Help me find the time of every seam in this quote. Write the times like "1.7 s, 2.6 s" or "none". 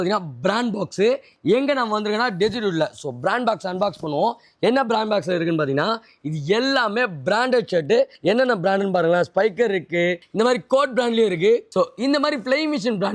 8.1 s, 10.2 s, 11.7 s